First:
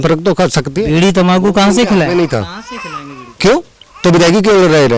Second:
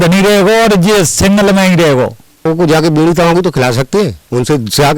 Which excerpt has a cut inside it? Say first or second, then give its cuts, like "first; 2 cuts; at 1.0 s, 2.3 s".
second; 1 cut; at 2.4 s